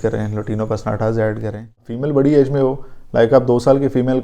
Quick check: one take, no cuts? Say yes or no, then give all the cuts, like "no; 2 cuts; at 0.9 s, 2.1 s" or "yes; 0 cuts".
no; 1 cut; at 1.9 s